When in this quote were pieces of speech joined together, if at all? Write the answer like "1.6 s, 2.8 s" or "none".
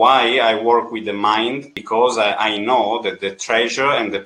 1.8 s